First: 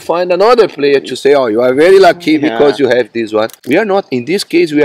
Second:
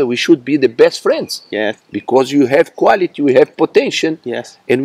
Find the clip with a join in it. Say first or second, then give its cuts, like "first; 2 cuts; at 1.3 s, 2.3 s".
first; 1 cut; at 3.6 s